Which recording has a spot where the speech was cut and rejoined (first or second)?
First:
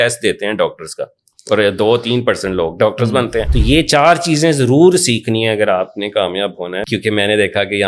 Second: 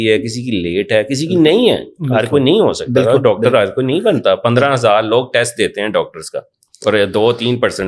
first